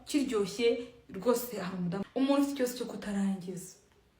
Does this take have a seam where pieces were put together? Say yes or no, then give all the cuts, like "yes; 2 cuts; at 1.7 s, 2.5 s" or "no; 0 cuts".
yes; 1 cut; at 2.0 s